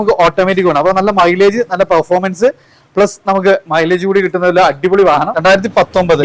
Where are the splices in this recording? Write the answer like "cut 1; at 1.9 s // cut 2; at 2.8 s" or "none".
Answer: cut 1; at 5.3 s

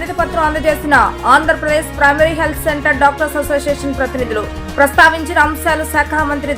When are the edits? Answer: none

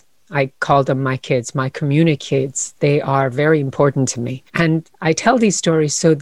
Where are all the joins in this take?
none

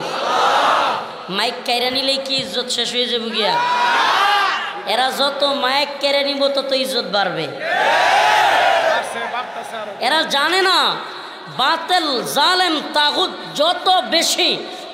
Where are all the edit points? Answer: none

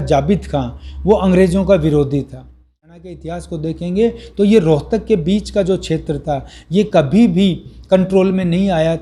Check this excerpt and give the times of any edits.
cut 1; at 2.8 s

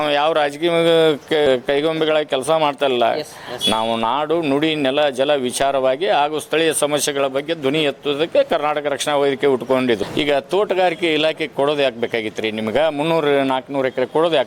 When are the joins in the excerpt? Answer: cut 1; at 1.5 s // cut 2; at 10.1 s

